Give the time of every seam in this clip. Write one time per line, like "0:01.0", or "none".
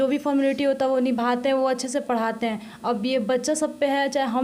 none